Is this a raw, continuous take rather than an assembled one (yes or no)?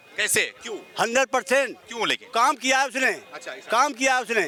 yes